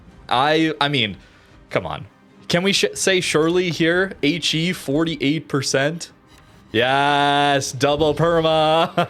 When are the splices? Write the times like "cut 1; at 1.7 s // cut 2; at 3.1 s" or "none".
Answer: none